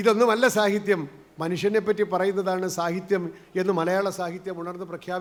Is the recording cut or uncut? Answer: uncut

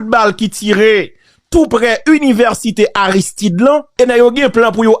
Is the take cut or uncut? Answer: cut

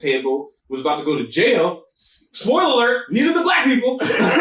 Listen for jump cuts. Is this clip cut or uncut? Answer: uncut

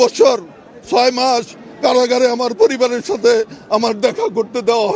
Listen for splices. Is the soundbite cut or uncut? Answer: uncut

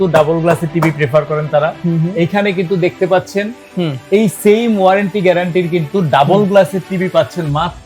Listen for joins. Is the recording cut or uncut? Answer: uncut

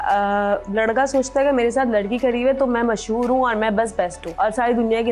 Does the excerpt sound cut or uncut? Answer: cut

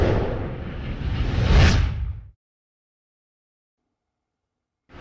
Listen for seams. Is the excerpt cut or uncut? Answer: uncut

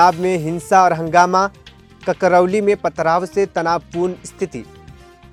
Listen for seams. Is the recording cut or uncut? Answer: uncut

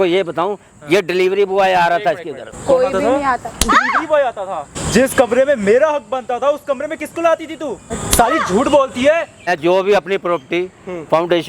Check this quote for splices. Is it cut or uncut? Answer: cut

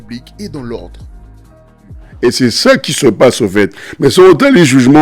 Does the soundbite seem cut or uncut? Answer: cut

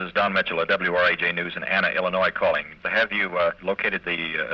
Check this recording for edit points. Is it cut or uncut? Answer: cut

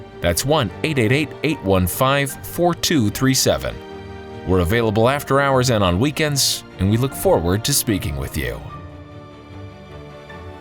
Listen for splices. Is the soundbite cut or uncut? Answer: cut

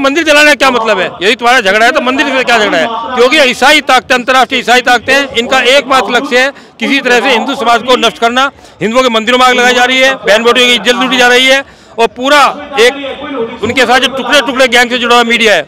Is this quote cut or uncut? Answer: uncut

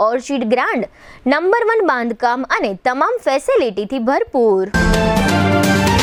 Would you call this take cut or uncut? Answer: uncut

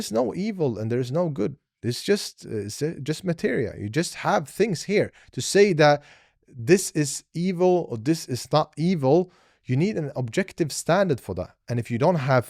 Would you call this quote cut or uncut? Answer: uncut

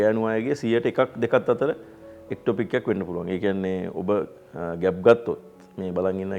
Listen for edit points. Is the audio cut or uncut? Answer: uncut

